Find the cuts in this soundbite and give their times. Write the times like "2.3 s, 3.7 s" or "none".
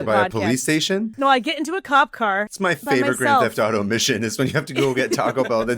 1.1 s, 2.5 s